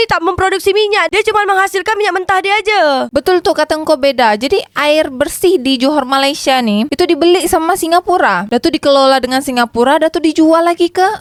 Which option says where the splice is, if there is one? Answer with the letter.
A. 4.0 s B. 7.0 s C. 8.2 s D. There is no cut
D